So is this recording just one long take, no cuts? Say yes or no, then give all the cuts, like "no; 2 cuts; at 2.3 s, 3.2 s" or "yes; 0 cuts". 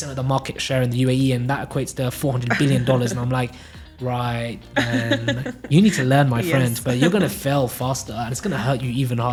yes; 0 cuts